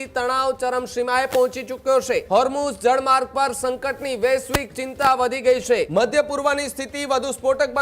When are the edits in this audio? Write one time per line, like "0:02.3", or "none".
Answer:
0:02.2
0:05.9